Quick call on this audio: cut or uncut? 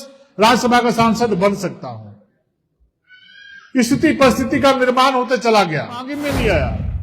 cut